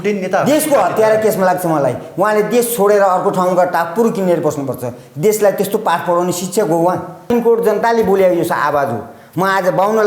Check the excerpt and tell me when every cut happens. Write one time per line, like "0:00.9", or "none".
0:07.2